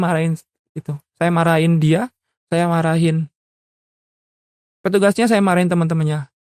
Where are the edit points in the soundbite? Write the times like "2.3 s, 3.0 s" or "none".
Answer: none

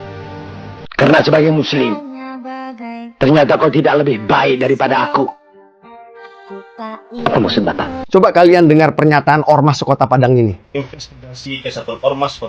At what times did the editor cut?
7.9 s

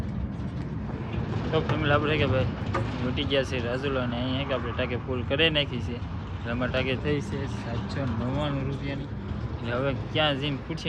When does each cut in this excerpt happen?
none

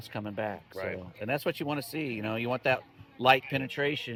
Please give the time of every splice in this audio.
none

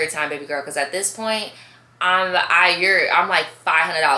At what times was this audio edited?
none

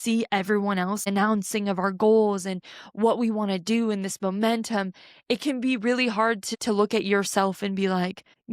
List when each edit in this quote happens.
1.0 s, 6.5 s

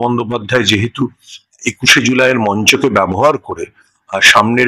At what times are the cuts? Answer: none

